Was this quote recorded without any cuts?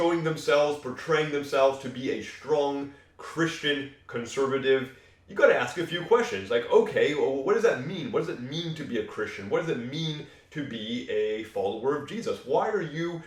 yes; 0 cuts

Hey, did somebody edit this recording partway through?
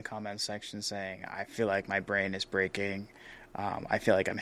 no; 0 cuts

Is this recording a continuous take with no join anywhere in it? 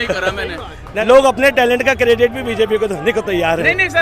no; 1 cut; at 1.0 s

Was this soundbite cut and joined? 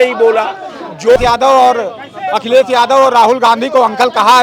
yes; 1 cut; at 1.2 s

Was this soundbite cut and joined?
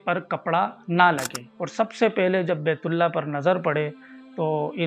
yes; 1 cut; at 1.4 s

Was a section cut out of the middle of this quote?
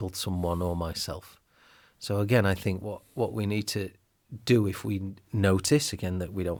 no; 0 cuts

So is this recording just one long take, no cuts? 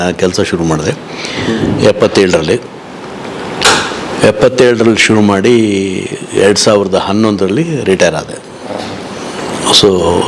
yes; 0 cuts

